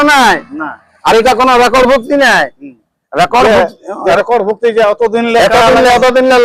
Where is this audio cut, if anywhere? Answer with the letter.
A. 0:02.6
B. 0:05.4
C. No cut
C